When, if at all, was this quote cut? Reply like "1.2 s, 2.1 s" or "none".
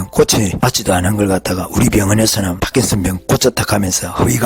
2.9 s